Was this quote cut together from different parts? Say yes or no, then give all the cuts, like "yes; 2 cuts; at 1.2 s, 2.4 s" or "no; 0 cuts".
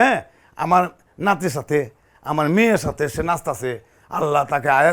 no; 0 cuts